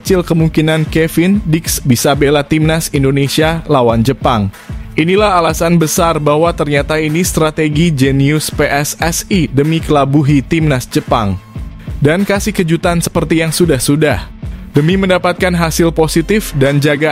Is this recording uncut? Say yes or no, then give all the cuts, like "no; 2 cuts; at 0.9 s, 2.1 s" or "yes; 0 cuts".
yes; 0 cuts